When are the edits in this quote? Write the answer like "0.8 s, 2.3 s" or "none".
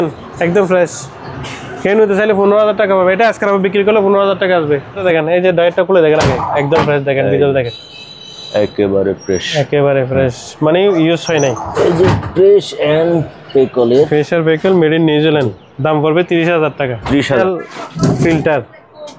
5.0 s, 17.4 s